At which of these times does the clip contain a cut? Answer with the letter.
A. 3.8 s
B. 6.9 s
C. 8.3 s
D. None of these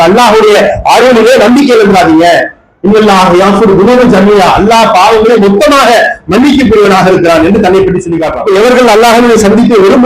C